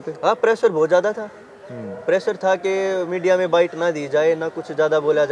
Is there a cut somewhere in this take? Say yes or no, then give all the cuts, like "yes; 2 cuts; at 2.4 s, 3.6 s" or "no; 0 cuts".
no; 0 cuts